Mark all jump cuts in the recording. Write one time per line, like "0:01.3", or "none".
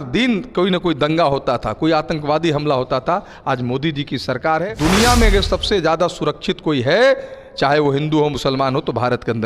0:04.6